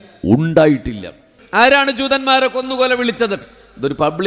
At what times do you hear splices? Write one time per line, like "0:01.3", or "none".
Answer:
0:01.4